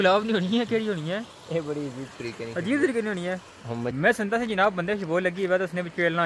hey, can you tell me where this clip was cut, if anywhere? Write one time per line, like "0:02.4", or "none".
0:03.9